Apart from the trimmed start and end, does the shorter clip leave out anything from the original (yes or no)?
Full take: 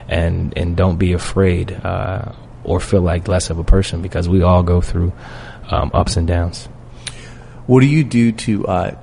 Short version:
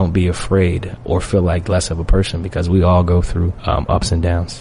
yes